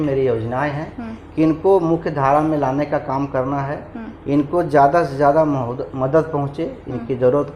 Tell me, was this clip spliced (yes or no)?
no